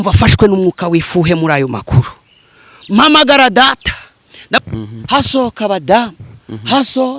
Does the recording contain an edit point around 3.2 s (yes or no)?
no